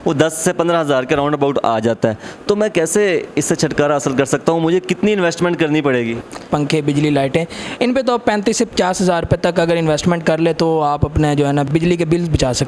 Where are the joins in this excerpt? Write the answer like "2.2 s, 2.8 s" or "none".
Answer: 6.5 s, 11.7 s